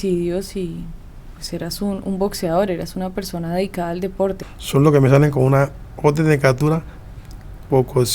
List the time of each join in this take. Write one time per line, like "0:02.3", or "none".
0:04.4